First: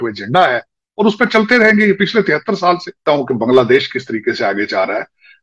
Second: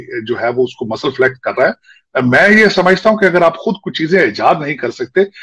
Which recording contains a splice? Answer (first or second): first